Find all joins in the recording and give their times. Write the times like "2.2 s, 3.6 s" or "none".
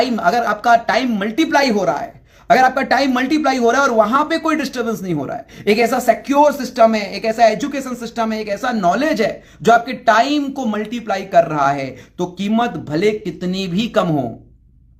none